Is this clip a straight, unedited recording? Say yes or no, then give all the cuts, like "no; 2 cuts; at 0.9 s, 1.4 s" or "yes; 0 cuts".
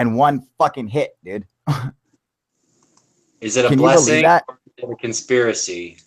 yes; 0 cuts